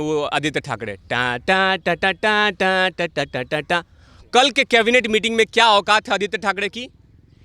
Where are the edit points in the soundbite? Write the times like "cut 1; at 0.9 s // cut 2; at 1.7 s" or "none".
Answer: none